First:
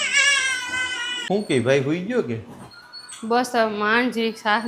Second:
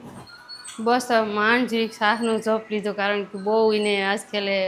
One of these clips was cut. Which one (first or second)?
first